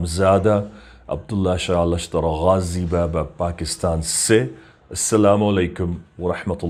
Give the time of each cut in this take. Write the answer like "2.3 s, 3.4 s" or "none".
none

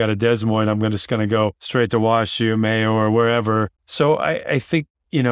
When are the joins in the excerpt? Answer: 1.6 s, 3.8 s

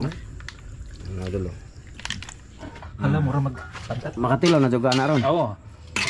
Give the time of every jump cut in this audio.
2.7 s

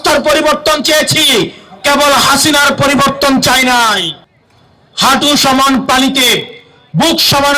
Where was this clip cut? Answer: 4.2 s

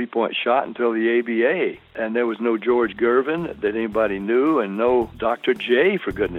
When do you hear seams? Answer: 1.9 s, 5.1 s

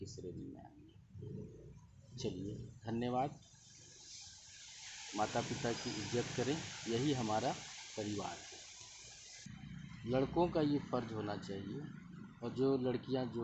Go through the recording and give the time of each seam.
9.5 s

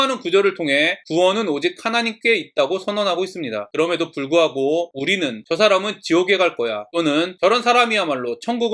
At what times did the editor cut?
1.0 s, 3.7 s, 5.1 s, 7.1 s

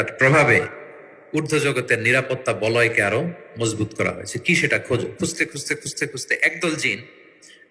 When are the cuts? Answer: none

